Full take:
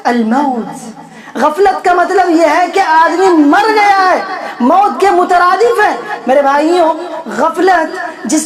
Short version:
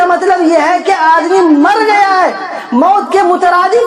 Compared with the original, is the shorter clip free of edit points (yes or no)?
yes